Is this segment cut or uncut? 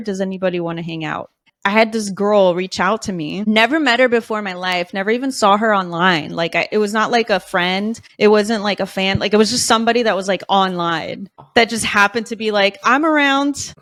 uncut